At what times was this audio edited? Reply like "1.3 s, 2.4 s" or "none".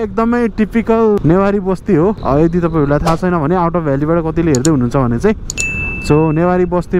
1.2 s, 2.2 s